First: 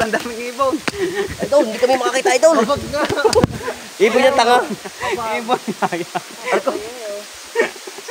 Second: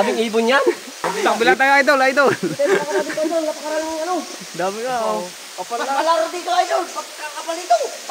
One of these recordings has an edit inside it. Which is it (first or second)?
second